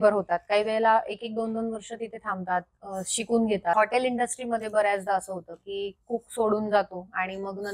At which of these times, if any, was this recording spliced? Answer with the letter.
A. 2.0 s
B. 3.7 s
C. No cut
B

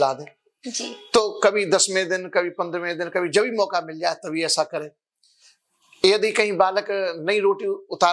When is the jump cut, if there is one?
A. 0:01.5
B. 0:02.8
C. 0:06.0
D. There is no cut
D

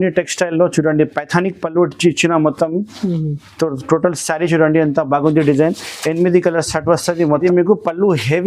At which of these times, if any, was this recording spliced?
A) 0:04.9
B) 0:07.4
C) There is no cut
B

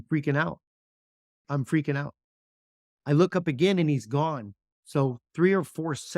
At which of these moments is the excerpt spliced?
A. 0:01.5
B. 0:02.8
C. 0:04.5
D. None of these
A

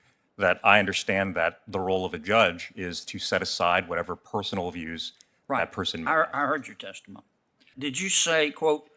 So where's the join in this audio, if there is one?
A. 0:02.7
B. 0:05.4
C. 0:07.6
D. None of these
C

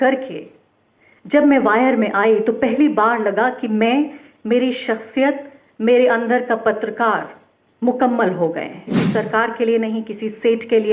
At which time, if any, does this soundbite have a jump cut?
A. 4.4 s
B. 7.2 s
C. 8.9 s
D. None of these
C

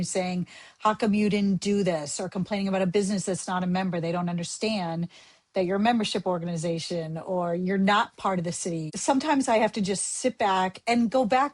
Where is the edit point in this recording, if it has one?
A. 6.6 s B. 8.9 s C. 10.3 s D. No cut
B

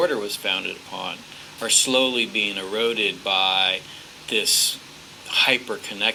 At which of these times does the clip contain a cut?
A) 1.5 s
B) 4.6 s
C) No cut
C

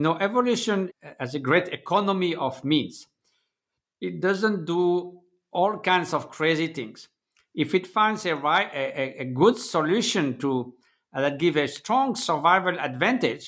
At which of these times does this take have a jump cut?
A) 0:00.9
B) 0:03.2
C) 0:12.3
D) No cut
A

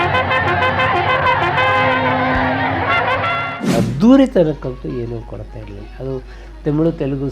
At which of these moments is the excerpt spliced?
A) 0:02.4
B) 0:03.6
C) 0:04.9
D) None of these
B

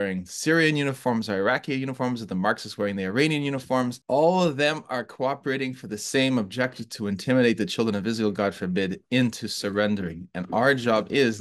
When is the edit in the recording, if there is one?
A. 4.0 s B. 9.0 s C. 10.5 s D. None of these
A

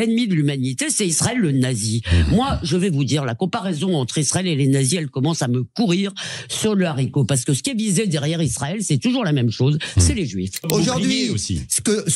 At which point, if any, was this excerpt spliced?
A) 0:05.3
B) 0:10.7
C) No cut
B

